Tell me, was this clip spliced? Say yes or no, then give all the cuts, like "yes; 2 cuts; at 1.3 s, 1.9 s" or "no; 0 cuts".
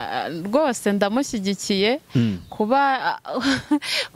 no; 0 cuts